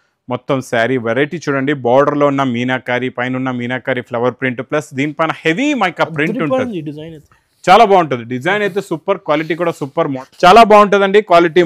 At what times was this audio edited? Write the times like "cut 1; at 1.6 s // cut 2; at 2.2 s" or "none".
cut 1; at 10.2 s